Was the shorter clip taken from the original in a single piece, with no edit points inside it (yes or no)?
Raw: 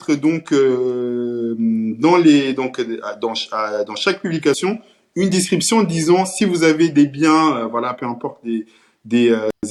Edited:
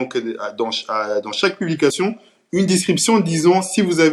yes